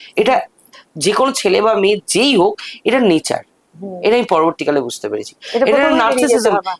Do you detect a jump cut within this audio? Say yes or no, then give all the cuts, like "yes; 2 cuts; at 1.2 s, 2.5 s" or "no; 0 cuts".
no; 0 cuts